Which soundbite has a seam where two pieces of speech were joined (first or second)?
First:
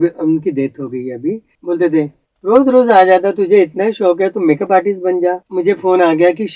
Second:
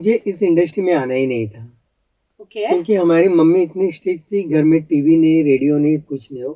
first